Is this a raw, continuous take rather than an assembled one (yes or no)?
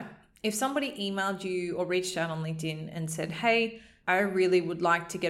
no